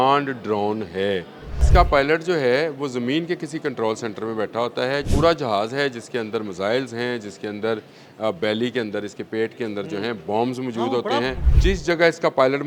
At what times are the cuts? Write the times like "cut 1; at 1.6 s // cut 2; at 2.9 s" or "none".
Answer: cut 1; at 1.6 s // cut 2; at 5.1 s // cut 3; at 11.4 s